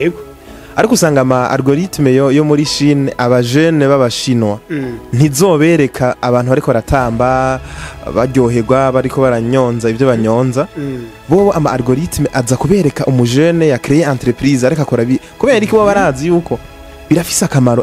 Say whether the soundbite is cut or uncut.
uncut